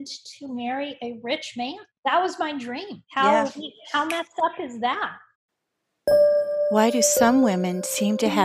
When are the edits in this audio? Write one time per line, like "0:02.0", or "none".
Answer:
0:05.3